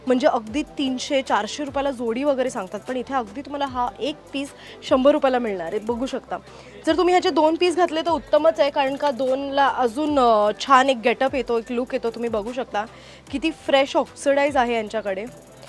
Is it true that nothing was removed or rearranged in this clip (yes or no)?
yes